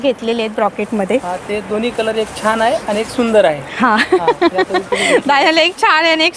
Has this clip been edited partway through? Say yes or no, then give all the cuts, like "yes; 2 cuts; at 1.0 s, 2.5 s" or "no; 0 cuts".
no; 0 cuts